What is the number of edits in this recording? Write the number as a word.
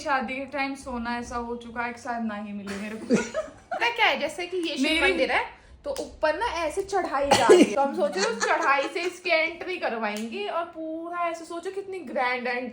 two